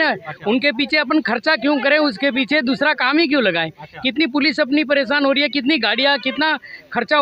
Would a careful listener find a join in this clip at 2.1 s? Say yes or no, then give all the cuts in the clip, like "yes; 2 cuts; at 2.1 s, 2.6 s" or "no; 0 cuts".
no; 0 cuts